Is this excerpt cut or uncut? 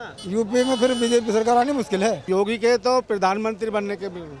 cut